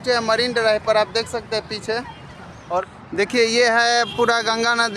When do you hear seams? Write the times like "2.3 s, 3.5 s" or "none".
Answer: 2.9 s